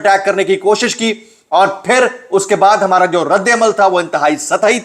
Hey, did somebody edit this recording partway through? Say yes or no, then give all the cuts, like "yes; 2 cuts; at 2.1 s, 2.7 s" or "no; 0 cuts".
no; 0 cuts